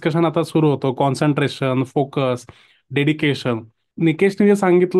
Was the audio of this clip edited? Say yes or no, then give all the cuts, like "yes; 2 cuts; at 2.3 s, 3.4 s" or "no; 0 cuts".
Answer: yes; 1 cut; at 3.8 s